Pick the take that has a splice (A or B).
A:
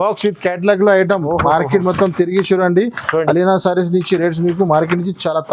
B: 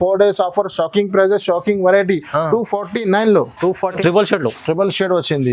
B